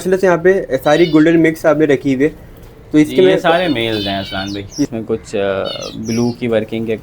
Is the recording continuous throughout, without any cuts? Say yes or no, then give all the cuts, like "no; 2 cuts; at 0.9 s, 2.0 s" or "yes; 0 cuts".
no; 1 cut; at 4.9 s